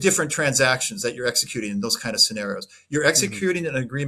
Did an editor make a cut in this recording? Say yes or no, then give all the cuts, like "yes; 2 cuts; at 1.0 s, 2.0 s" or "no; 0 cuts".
no; 0 cuts